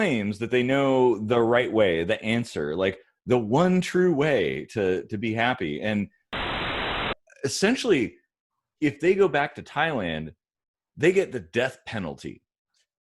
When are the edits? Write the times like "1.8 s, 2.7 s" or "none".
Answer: 6.8 s